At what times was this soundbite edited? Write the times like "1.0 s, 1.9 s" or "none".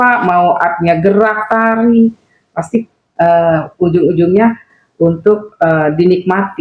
none